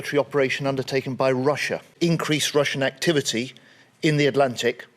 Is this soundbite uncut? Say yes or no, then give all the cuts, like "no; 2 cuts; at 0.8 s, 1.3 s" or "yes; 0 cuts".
no; 1 cut; at 1.9 s